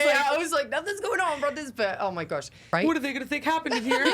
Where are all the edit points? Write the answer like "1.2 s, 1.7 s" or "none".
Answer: 2.6 s